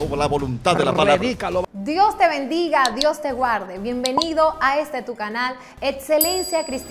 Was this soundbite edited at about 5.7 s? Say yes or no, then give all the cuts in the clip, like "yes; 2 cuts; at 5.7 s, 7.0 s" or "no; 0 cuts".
no; 1 cut; at 1.6 s